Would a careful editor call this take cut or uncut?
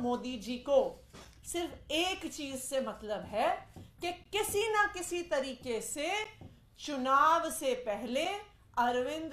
uncut